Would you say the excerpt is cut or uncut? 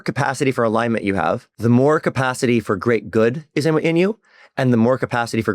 cut